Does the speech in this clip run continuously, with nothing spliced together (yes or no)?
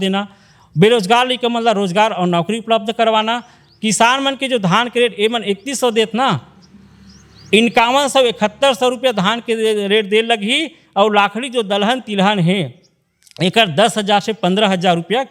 yes